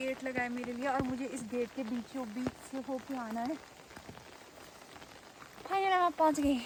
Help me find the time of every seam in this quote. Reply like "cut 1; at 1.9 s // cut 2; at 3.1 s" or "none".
none